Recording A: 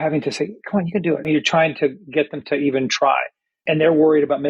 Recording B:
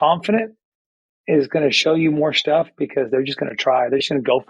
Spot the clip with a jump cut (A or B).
A